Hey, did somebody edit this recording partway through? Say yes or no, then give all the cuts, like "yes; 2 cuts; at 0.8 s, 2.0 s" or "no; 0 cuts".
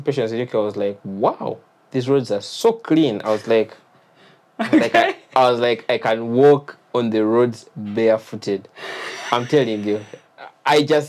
no; 0 cuts